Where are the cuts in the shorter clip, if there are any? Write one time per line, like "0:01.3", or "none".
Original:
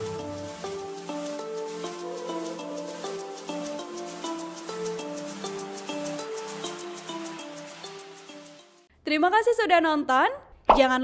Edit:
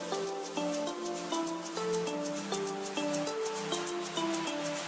none